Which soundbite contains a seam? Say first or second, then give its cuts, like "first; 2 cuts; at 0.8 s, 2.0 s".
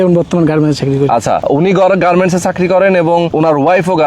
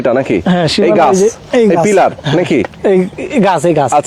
first; 2 cuts; at 1.4 s, 3.3 s